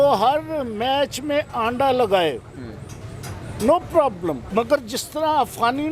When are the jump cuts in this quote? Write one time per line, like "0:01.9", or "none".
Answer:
0:04.4